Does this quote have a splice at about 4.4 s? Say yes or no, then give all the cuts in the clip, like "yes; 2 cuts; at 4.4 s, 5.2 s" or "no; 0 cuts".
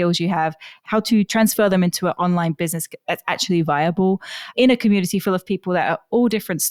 no; 0 cuts